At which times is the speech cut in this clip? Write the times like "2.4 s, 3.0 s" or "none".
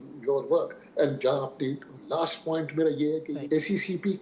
3.3 s